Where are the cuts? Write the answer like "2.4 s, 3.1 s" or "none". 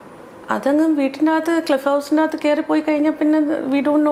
none